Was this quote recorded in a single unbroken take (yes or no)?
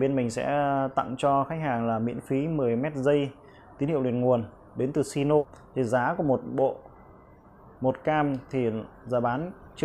no